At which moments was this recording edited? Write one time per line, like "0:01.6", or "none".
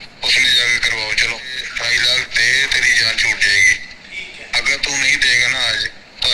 0:01.6

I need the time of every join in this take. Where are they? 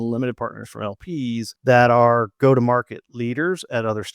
0:01.5

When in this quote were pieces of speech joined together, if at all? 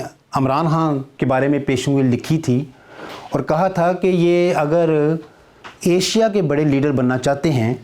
0:01.1

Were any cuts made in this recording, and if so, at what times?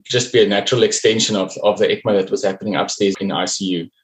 0:03.1

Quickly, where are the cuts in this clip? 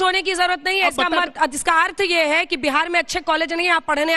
none

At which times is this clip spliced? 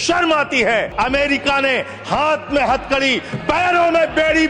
0:00.9

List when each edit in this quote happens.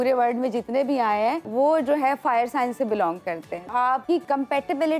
0:01.4
0:03.7

